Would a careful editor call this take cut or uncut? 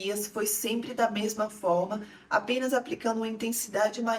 uncut